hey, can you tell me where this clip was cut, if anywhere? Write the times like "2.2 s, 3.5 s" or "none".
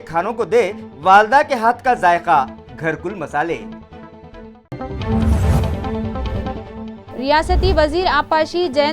4.7 s